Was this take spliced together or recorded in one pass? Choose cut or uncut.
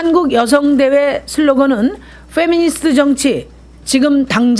uncut